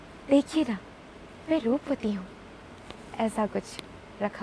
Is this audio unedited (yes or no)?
yes